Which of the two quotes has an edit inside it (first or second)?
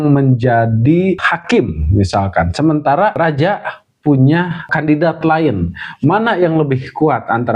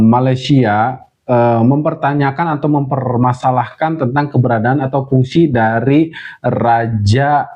first